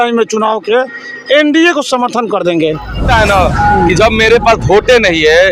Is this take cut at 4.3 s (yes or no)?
no